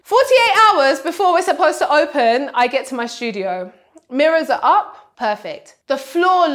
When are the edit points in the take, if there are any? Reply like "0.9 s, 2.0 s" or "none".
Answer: none